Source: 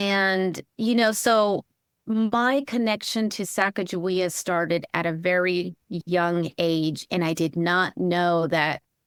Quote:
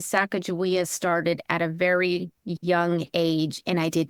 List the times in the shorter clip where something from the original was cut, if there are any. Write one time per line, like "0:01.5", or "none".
none